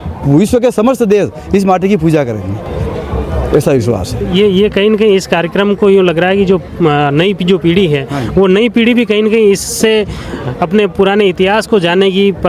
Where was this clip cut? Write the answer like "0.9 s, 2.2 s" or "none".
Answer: none